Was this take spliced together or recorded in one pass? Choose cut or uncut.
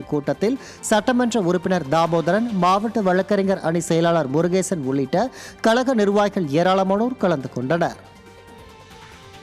cut